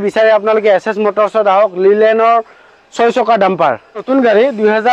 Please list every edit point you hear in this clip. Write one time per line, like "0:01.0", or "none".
0:04.0